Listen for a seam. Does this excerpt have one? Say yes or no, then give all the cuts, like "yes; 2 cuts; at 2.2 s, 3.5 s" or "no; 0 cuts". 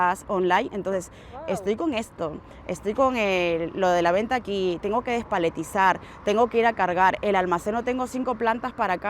no; 0 cuts